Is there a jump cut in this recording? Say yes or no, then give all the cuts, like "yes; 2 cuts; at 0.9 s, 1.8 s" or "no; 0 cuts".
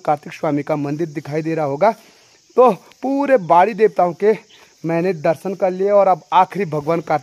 no; 0 cuts